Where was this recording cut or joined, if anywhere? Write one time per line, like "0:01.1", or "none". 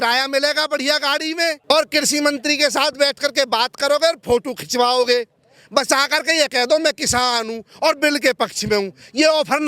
0:01.6

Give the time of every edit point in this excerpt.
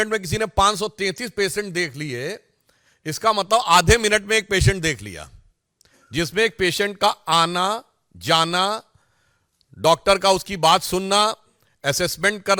none

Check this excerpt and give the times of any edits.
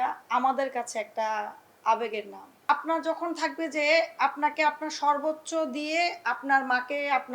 0:02.7

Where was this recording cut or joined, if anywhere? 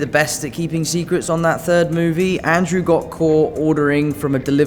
none

